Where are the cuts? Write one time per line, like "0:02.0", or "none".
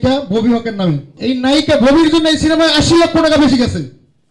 0:01.1